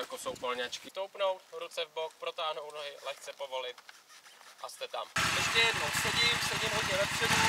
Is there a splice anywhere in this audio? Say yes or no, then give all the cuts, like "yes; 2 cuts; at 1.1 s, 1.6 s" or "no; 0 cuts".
yes; 2 cuts; at 0.8 s, 5.1 s